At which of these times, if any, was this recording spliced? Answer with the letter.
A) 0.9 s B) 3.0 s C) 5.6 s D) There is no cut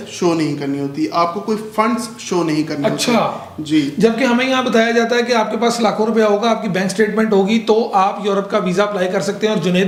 D